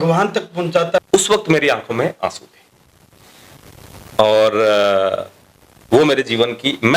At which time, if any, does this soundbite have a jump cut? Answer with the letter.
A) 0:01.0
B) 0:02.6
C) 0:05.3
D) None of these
A